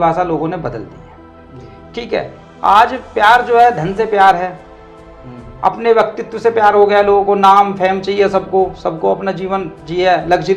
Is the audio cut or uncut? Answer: uncut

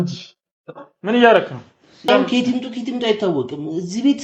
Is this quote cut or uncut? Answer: cut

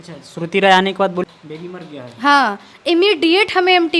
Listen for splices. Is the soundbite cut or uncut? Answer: cut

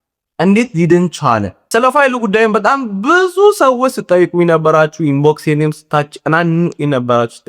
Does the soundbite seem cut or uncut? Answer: cut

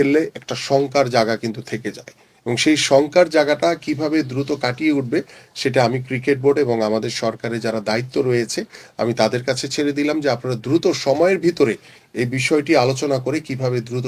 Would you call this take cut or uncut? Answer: uncut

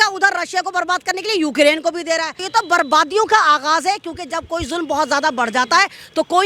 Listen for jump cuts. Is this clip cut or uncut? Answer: cut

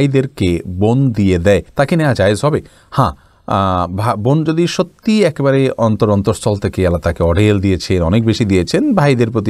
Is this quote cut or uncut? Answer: uncut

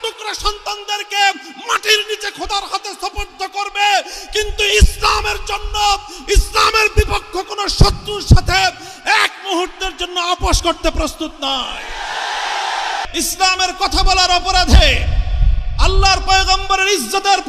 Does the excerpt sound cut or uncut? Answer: cut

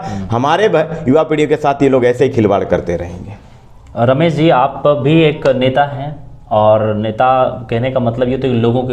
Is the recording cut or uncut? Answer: uncut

